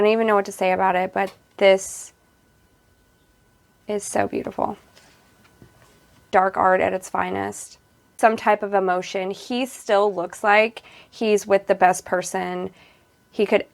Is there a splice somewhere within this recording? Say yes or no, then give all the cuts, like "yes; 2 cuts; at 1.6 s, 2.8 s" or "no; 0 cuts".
yes; 2 cuts; at 6.3 s, 8.2 s